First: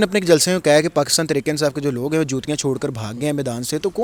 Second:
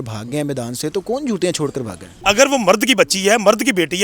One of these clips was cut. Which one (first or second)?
second